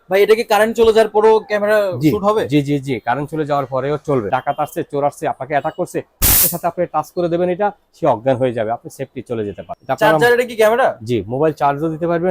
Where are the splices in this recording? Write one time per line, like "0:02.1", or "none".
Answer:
0:04.3
0:09.7